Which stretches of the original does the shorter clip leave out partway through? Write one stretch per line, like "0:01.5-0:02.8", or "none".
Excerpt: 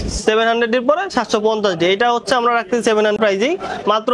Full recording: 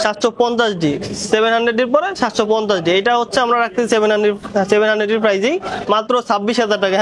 0:04.2-0:05.2